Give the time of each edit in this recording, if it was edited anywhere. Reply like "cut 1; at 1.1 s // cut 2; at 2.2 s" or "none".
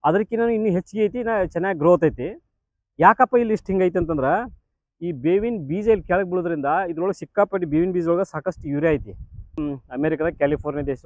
cut 1; at 9.6 s